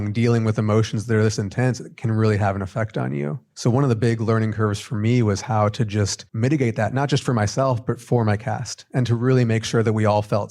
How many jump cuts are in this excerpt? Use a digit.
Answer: 2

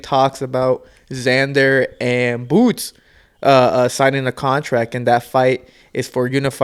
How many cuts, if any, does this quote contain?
0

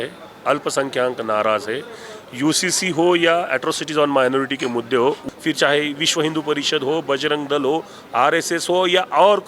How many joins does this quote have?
1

